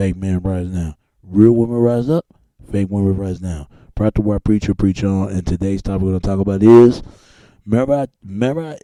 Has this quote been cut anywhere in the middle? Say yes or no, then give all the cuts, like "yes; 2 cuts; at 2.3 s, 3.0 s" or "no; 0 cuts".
no; 0 cuts